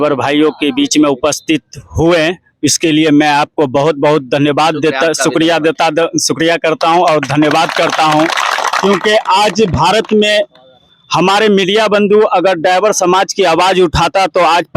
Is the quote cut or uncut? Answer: uncut